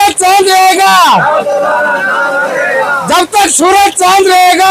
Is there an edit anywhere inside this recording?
no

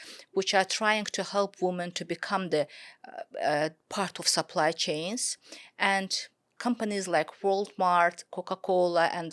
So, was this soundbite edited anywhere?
no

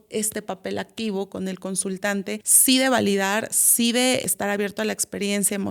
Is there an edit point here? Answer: yes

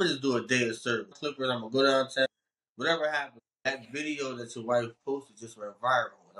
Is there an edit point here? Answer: yes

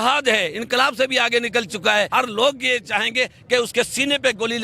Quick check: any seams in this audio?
yes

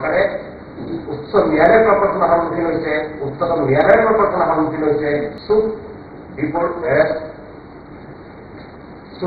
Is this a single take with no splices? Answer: no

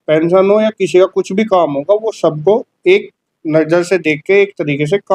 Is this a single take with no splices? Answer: yes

